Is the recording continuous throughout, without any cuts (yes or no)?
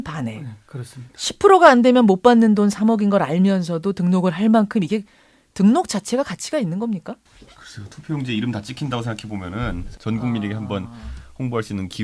yes